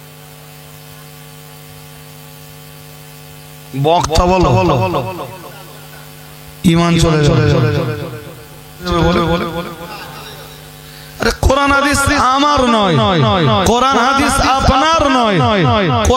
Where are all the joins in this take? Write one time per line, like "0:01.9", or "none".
0:08.9